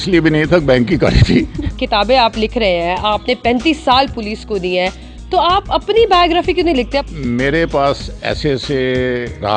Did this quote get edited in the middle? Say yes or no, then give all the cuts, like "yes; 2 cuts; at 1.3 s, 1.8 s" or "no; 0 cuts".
yes; 2 cuts; at 1.6 s, 7.0 s